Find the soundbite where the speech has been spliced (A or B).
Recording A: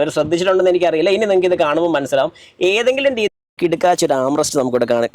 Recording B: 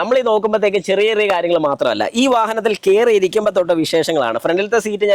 A